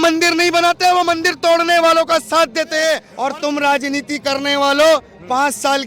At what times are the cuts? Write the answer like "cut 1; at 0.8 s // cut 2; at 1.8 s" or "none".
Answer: cut 1; at 3.1 s